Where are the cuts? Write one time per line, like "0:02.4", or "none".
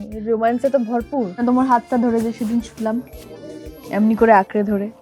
0:01.4

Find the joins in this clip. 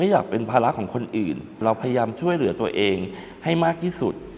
0:01.6

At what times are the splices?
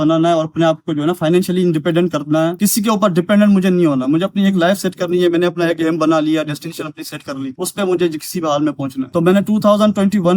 none

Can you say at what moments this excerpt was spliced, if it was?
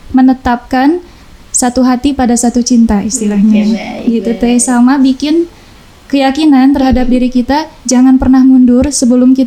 none

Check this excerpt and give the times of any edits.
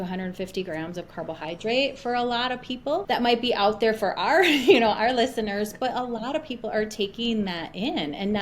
0:03.0

